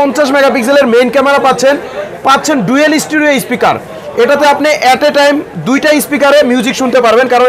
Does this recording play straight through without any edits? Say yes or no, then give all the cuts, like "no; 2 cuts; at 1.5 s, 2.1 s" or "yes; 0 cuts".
yes; 0 cuts